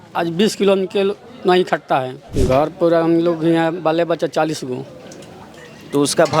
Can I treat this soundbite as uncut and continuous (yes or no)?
no